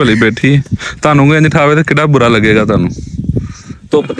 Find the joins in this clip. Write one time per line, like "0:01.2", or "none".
none